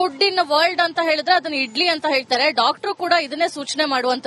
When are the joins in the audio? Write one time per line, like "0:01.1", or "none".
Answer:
none